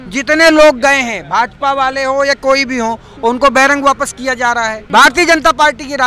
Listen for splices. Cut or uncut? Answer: cut